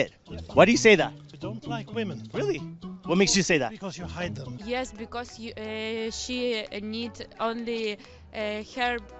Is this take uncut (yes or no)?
no